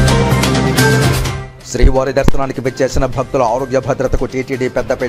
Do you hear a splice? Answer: yes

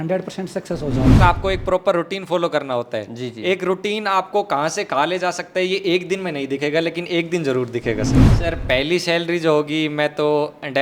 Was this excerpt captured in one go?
no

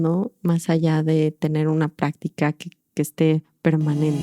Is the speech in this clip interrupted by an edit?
no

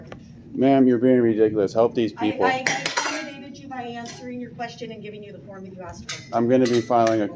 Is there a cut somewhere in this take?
no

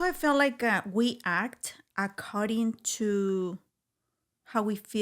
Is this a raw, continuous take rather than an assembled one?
yes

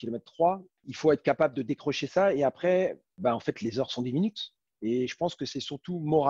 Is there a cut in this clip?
yes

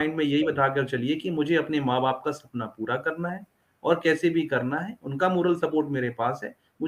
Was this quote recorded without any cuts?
yes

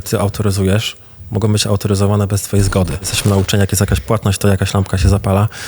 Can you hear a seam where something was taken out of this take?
yes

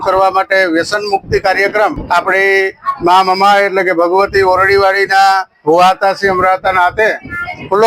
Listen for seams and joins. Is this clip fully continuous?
no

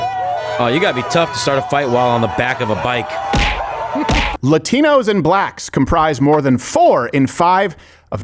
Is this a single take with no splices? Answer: no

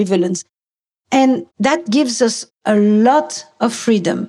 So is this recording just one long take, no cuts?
no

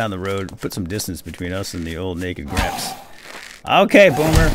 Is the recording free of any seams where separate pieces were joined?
yes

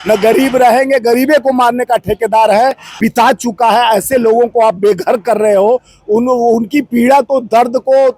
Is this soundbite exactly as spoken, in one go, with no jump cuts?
no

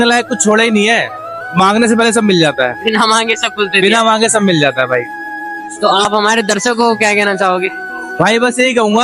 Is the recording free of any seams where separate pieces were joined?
yes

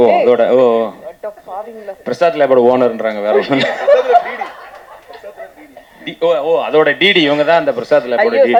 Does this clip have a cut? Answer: no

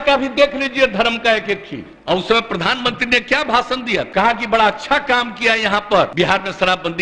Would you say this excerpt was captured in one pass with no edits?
no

